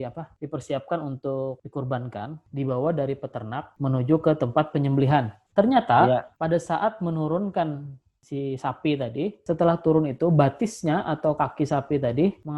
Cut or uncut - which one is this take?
cut